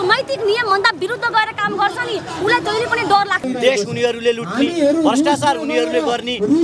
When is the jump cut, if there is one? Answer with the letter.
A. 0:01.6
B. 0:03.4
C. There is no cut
B